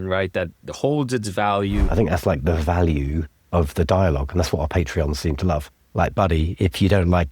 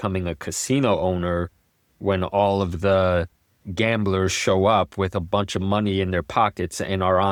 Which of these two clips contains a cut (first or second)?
first